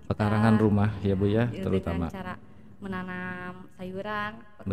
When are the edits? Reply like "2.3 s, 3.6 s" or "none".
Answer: none